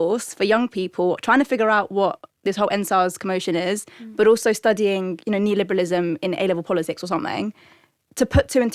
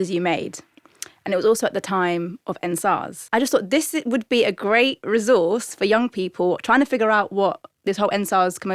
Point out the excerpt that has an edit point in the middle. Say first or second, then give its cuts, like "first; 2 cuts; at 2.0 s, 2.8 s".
second; 1 cut; at 3.1 s